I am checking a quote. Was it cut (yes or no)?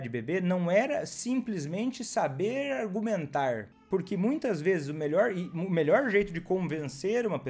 yes